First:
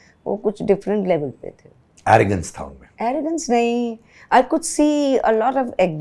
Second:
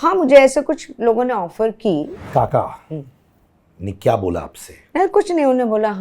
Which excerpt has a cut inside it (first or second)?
second